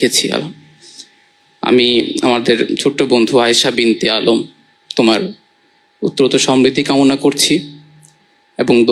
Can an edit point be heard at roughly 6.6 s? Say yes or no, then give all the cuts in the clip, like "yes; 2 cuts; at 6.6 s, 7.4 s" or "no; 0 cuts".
no; 0 cuts